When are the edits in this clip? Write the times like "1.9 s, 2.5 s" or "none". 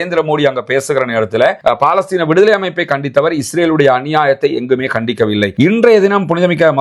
1.6 s, 5.5 s